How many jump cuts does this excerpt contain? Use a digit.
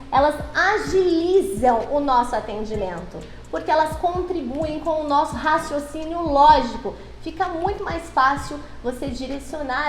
0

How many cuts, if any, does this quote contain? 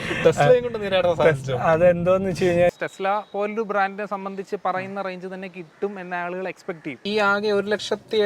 2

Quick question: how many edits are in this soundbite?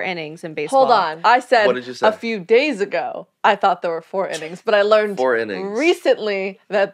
1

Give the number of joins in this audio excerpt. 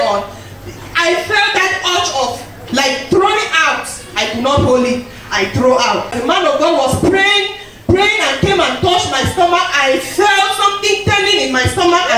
1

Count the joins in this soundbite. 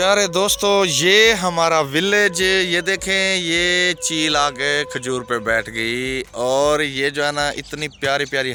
0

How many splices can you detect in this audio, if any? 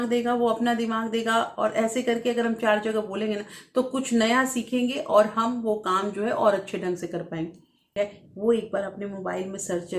1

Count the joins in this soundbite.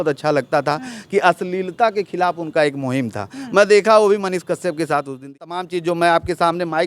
1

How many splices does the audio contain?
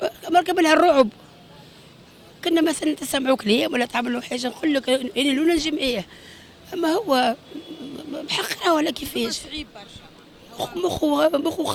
0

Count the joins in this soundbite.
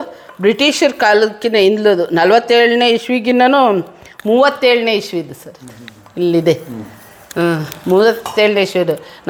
0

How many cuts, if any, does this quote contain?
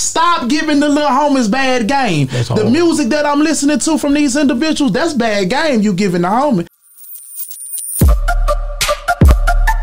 1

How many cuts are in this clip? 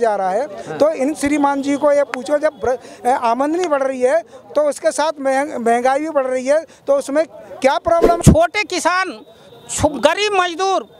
1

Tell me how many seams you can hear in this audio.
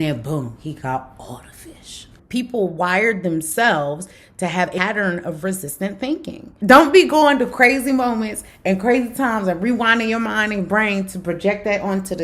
3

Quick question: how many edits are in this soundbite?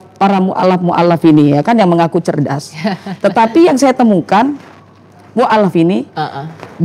0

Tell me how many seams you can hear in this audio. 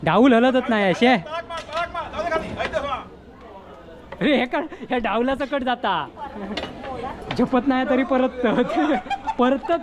1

